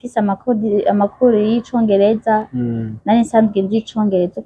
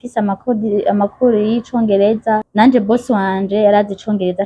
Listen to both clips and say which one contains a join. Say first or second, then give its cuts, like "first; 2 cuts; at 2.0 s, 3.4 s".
second; 1 cut; at 2.5 s